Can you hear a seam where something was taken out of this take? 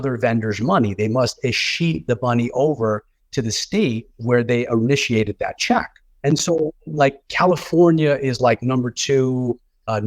no; 0 cuts

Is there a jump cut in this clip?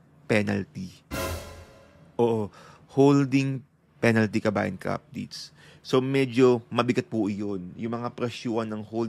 no; 0 cuts

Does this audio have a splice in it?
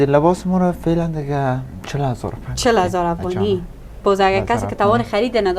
no; 0 cuts

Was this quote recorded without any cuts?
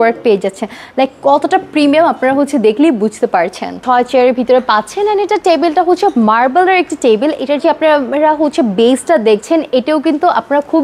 no; 1 cut; at 3.8 s

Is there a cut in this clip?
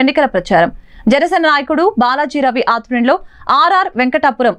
no; 0 cuts

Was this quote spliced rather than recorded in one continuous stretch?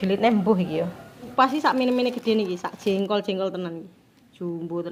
yes; 1 cut; at 1.3 s

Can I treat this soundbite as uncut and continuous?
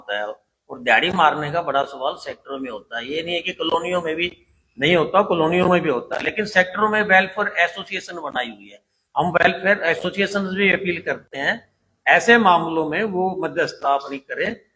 yes; 0 cuts

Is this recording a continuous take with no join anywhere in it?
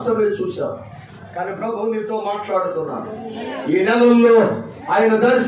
no; 2 cuts; at 1.0 s, 3.4 s

